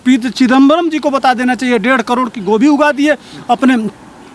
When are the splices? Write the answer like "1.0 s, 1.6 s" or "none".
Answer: none